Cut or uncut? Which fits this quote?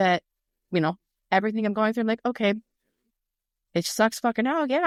uncut